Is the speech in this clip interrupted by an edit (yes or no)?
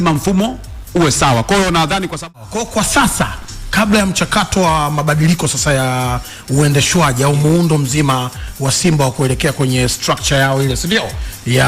yes